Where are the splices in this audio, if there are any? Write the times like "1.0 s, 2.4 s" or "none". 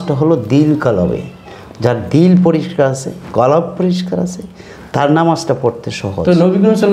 none